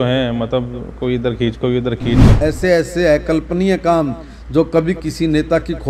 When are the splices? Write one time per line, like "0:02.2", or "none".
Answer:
0:02.4